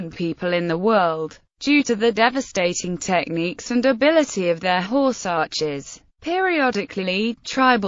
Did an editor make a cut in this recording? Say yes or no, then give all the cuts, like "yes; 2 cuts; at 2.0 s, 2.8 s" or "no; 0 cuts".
yes; 1 cut; at 6.4 s